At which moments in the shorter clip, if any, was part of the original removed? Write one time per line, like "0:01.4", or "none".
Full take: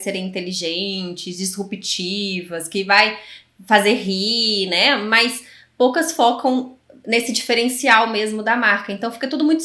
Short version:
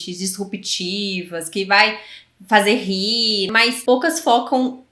0:03.5